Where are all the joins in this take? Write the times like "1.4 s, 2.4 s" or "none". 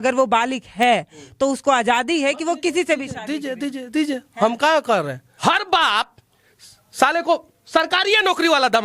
5.2 s

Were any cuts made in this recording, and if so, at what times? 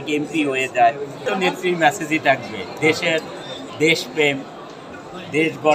1.1 s

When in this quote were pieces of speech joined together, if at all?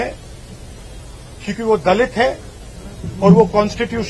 none

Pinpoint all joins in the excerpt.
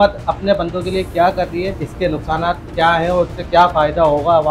1.8 s

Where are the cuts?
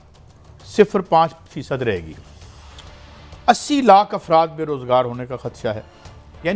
none

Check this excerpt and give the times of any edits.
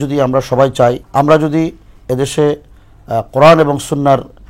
1.0 s

